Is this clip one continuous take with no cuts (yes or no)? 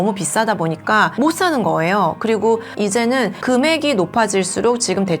no